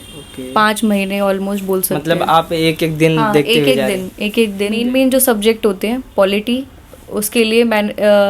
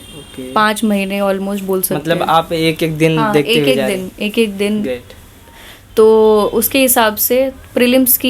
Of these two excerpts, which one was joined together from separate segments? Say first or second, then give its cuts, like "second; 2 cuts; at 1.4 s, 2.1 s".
first; 1 cut; at 4.8 s